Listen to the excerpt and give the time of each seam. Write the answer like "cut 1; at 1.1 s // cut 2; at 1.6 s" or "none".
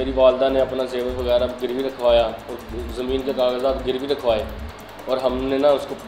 none